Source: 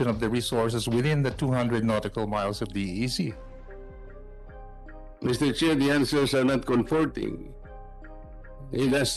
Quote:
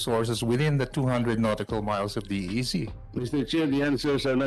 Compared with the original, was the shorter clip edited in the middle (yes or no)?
yes